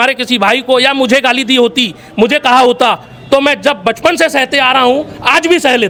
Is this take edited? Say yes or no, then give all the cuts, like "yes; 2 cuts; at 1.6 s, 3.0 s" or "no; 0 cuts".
no; 0 cuts